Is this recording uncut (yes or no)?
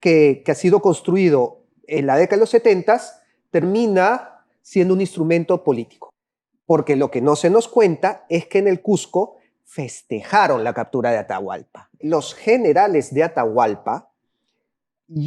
no